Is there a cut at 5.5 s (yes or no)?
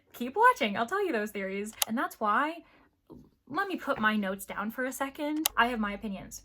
yes